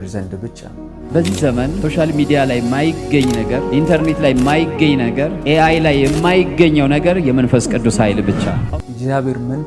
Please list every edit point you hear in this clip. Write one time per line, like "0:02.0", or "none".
0:01.0
0:08.5